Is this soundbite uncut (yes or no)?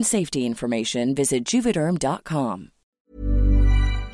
no